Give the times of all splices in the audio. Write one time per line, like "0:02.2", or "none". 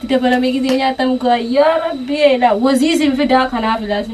none